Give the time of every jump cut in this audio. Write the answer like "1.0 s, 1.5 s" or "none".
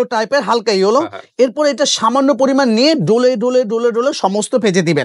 none